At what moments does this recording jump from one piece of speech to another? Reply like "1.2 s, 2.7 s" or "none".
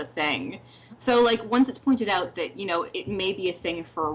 1.0 s, 3.0 s